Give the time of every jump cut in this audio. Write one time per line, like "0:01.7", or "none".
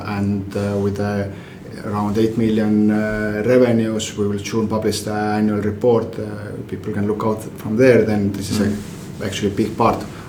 none